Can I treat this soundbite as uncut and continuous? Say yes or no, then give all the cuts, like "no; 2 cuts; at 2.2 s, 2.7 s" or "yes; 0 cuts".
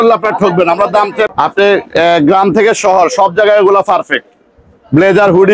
no; 1 cut; at 1.3 s